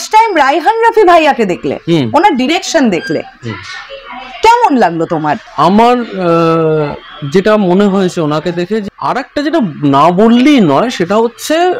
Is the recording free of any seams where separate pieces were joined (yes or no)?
no